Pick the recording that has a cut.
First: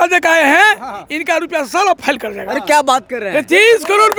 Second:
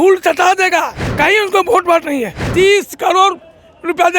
second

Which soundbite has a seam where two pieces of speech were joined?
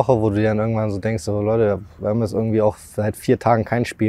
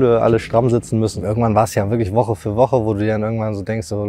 second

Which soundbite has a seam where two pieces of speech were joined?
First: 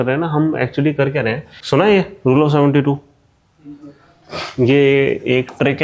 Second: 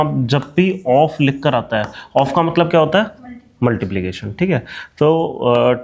first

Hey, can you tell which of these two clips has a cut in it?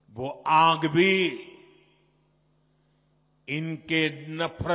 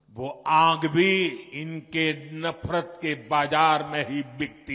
second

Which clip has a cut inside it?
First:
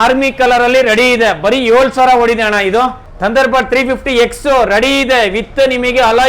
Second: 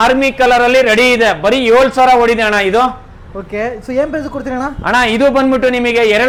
first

